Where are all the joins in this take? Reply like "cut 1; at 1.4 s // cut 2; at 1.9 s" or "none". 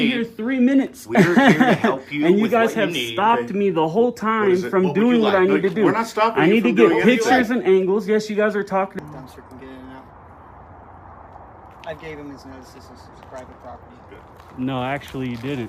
cut 1; at 8.9 s